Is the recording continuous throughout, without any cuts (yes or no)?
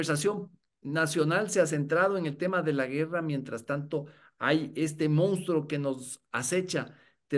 yes